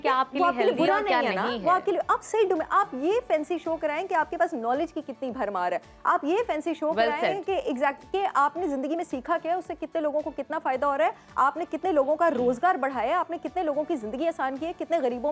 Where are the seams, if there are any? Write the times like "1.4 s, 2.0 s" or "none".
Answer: none